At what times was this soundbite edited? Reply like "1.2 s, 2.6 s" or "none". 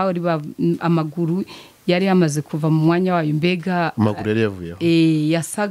none